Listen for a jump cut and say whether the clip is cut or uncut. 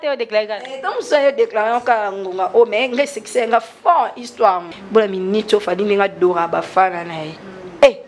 cut